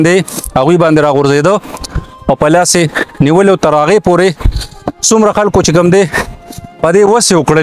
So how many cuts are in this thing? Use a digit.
0